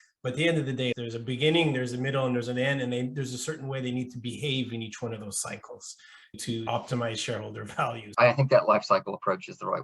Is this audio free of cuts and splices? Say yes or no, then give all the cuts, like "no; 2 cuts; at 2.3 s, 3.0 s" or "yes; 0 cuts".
no; 2 cuts; at 1.0 s, 8.1 s